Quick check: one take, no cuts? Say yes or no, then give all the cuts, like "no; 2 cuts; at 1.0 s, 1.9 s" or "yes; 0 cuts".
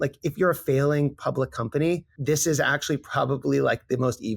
no; 1 cut; at 2.1 s